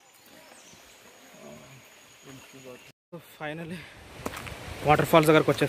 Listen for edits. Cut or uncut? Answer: cut